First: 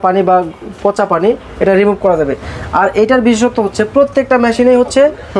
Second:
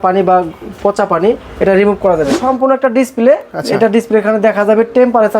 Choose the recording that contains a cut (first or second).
second